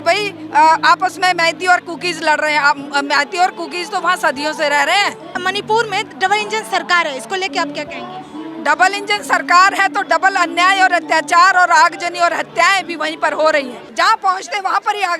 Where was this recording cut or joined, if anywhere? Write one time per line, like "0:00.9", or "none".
0:05.4
0:13.8